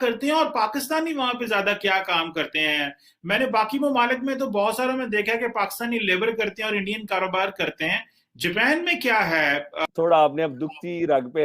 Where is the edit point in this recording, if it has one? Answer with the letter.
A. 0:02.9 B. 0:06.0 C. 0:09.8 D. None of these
C